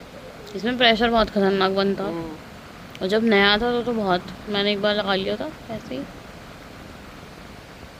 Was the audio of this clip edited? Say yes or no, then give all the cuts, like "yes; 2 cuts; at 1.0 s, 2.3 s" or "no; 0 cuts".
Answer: no; 0 cuts